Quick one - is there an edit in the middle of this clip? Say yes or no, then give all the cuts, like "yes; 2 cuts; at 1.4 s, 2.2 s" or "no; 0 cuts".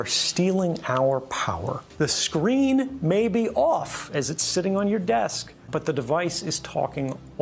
yes; 2 cuts; at 1.8 s, 5.6 s